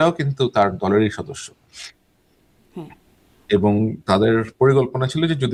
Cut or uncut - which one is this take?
uncut